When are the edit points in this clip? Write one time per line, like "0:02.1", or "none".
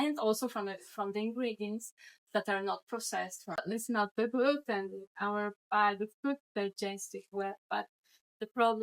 0:03.6